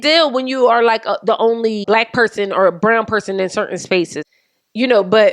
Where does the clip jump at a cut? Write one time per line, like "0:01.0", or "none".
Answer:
0:01.8
0:04.2